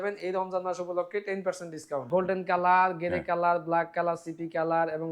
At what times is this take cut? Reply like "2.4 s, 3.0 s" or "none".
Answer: 2.1 s